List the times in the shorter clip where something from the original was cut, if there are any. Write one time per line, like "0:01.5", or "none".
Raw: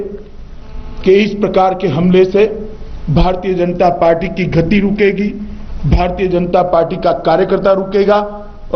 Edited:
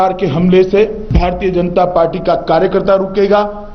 0:01.0